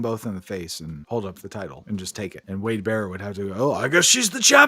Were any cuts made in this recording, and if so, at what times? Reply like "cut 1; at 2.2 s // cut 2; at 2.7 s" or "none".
cut 1; at 1.0 s // cut 2; at 2.1 s